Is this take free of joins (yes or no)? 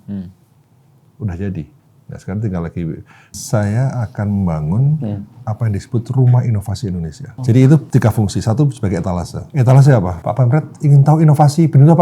no